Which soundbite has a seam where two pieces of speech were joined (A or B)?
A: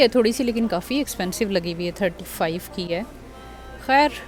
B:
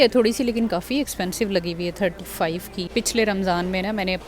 B